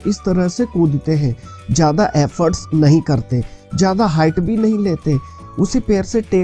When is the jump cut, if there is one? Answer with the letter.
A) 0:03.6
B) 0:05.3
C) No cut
B